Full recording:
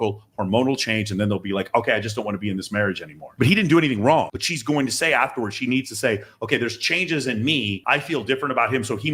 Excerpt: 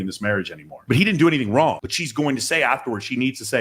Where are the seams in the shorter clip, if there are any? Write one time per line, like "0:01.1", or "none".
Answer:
none